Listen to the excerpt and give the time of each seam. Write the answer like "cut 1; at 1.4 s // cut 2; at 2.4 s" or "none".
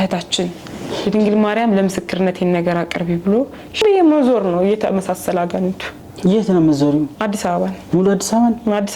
cut 1; at 3.8 s